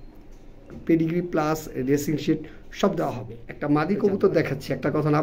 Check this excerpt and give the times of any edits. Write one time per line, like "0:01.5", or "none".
0:03.6

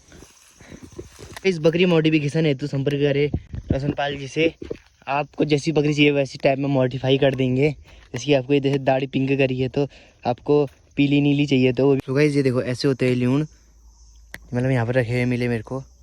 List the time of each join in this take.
0:01.4
0:12.0

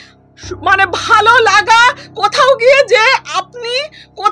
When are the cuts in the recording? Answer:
none

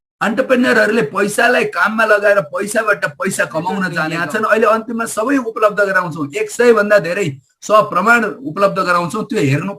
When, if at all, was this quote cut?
0:04.0

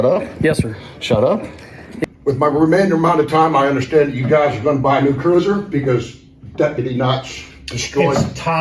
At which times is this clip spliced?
0:02.0

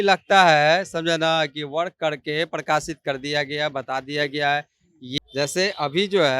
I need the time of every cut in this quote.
0:05.1

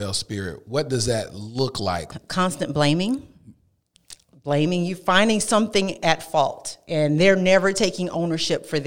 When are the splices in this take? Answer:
0:02.1

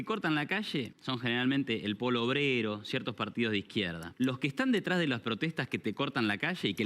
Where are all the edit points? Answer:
0:01.0
0:04.0

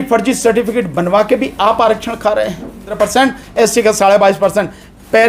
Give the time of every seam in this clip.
0:02.9

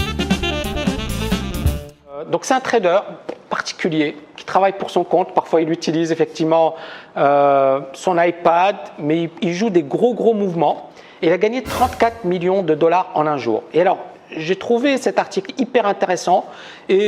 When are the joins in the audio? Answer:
0:13.9

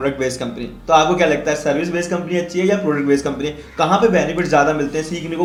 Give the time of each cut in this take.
none

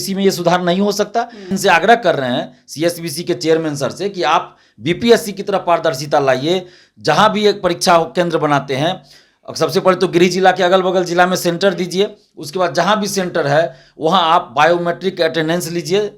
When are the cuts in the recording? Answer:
0:01.5

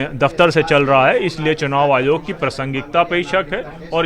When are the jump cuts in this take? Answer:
none

